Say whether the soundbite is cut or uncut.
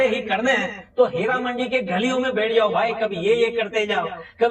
uncut